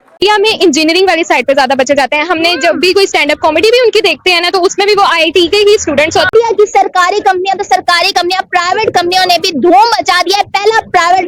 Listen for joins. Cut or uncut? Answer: uncut